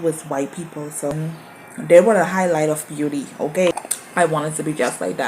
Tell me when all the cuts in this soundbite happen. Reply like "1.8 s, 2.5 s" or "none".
1.1 s, 3.7 s